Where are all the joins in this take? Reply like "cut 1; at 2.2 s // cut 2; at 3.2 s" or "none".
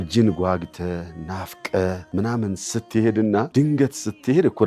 cut 1; at 2.0 s // cut 2; at 3.5 s

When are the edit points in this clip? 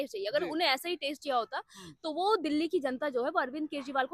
none

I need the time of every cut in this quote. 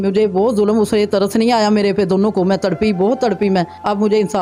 none

